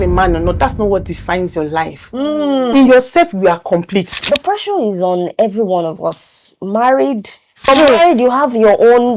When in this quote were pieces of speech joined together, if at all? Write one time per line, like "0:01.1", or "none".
0:04.2
0:07.7